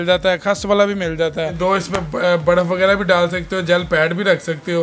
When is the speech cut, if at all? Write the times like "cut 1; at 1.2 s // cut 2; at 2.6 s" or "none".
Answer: cut 1; at 1.5 s

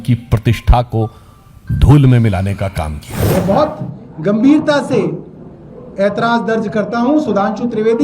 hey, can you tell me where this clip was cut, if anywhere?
cut 1; at 3.1 s

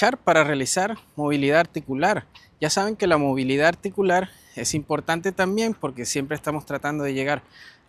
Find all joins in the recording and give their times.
none

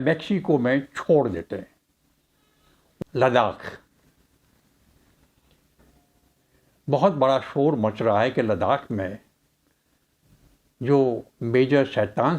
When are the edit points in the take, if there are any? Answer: cut 1; at 3.0 s

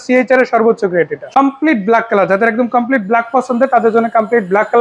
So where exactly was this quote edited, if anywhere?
cut 1; at 1.2 s

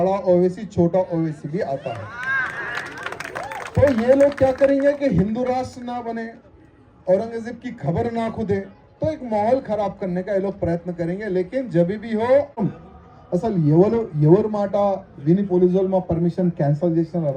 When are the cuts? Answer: cut 1; at 12.6 s

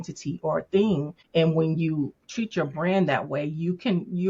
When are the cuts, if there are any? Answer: cut 1; at 1.2 s

